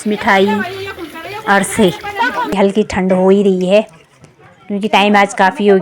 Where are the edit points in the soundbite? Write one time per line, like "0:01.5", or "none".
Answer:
0:02.5